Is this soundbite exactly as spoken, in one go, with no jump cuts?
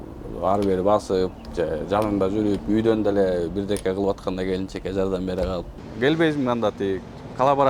no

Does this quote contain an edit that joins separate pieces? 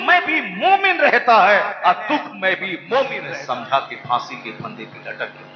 yes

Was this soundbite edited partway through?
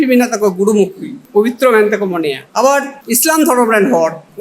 yes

